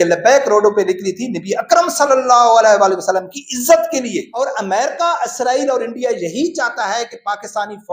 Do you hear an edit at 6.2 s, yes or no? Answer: no